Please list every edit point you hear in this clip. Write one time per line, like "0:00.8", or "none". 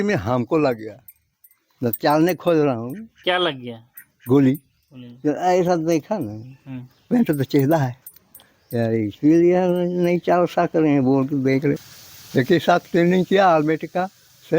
0:12.0